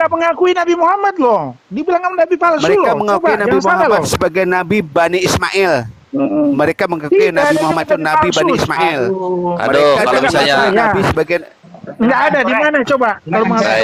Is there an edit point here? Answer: no; 0 cuts

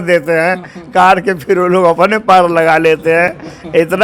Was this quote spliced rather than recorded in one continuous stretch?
no; 0 cuts

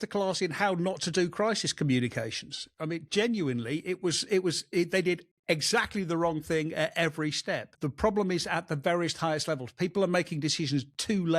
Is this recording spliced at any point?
yes; 1 cut; at 7.8 s

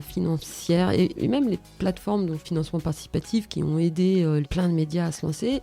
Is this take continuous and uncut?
no; 3 cuts; at 1.1 s, 2.4 s, 4.5 s

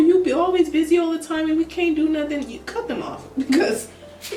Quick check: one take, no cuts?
yes; 0 cuts

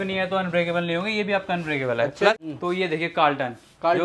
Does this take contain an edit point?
yes; 1 cut; at 2.4 s

